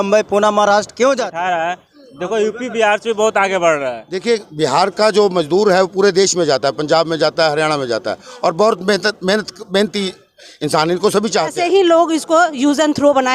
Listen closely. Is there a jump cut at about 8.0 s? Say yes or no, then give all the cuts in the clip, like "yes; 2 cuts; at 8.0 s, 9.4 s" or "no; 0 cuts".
no; 3 cuts; at 1.3 s, 4.1 s, 11.6 s